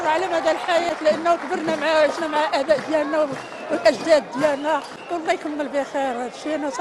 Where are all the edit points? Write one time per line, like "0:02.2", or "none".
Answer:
none